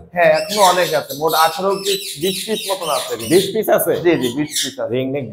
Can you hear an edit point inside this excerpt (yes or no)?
no